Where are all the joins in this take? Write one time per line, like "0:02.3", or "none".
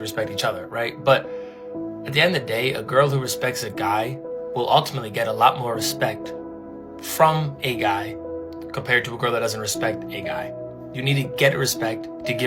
none